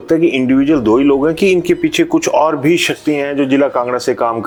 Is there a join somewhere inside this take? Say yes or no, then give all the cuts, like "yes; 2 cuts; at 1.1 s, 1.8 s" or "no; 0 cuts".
no; 0 cuts